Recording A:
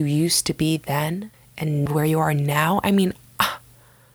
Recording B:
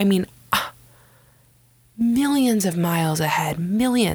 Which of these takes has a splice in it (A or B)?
A